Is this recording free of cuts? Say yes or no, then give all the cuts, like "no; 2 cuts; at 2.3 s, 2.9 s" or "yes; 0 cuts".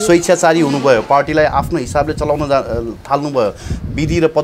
yes; 0 cuts